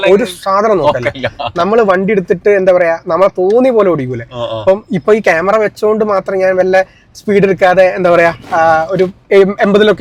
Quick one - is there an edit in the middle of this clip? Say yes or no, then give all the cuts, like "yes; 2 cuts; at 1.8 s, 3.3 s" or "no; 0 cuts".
no; 0 cuts